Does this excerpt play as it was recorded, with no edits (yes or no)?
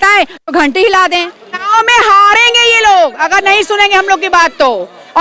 no